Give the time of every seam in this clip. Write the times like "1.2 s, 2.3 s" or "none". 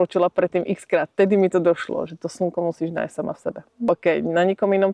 3.9 s